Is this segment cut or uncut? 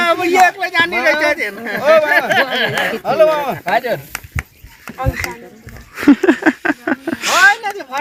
uncut